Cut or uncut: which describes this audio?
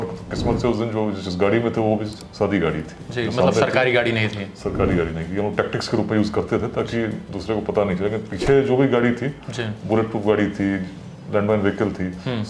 uncut